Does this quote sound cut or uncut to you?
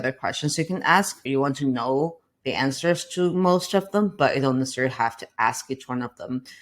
cut